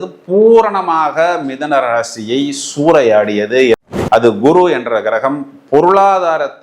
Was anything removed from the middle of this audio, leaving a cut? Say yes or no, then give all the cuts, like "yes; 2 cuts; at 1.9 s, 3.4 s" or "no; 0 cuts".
yes; 1 cut; at 3.8 s